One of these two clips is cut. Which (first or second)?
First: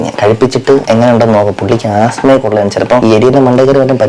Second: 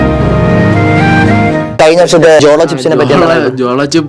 second